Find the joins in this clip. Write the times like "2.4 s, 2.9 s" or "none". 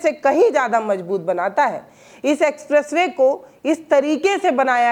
none